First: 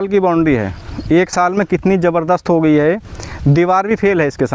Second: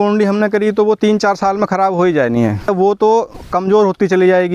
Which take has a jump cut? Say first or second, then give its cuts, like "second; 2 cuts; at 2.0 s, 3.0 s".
second; 1 cut; at 2.7 s